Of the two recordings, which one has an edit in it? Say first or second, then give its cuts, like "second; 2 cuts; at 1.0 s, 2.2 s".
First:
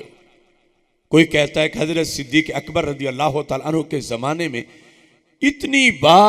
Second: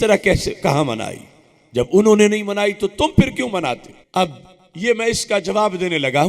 second; 1 cut; at 3.9 s